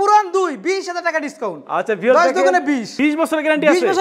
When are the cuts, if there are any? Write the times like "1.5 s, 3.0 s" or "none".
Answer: 2.9 s